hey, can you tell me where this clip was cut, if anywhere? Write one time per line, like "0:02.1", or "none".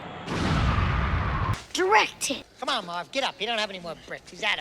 0:01.5